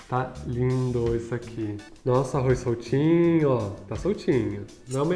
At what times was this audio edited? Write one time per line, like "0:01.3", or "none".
none